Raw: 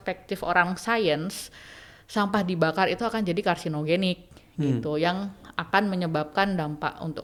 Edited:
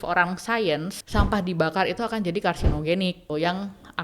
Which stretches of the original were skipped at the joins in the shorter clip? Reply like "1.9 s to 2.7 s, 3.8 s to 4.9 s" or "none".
1.4 s to 2.0 s, 4.3 s to 4.9 s